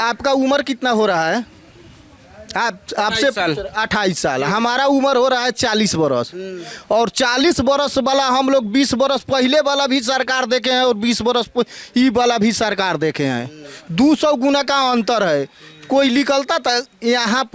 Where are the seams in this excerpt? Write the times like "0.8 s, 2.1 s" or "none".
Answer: none